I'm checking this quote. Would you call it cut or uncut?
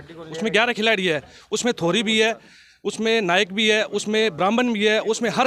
uncut